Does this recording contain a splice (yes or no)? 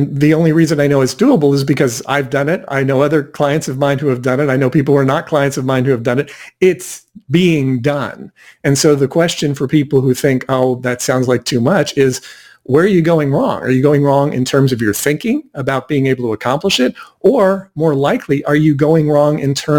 no